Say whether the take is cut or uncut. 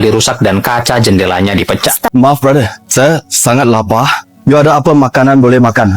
cut